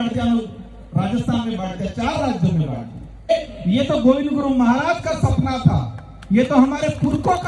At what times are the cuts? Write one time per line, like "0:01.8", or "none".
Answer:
0:03.3